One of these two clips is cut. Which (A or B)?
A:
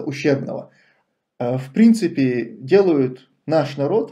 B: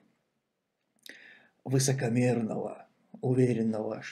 A